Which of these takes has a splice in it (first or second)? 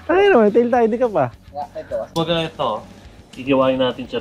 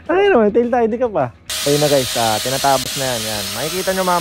second